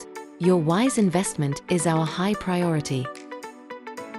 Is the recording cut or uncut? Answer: cut